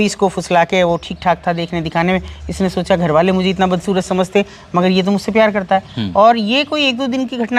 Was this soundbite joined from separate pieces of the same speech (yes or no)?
no